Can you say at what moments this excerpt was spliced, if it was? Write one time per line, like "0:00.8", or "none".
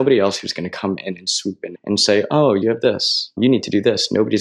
none

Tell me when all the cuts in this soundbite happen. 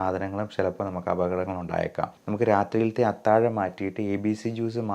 0:02.2

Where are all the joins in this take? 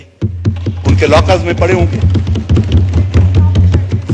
none

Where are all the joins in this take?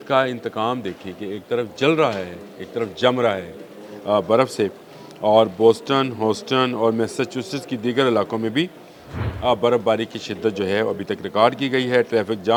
none

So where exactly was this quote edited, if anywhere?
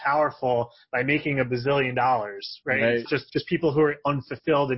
0:03.1

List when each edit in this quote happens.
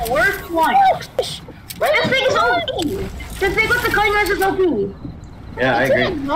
0:01.2

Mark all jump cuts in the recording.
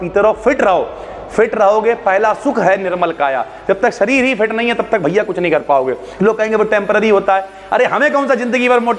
0:06.2

